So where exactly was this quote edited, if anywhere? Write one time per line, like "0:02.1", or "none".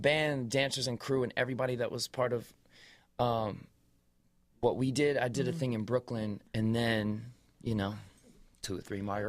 0:03.8